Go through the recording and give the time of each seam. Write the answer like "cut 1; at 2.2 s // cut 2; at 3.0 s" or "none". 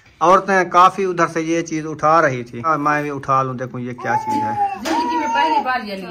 cut 1; at 2.7 s // cut 2; at 4.8 s